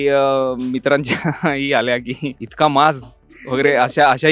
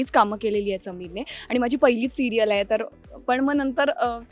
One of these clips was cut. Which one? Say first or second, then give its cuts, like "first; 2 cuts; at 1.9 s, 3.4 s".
first; 1 cut; at 2.4 s